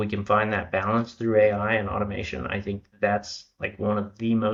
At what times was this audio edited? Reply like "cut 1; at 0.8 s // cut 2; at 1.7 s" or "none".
none